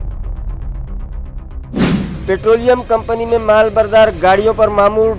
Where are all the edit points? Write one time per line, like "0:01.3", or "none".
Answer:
0:02.2